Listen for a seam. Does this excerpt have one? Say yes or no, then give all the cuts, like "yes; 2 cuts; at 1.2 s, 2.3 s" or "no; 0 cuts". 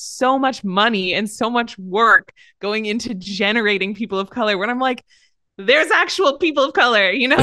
no; 0 cuts